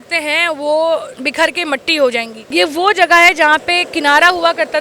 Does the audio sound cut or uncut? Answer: cut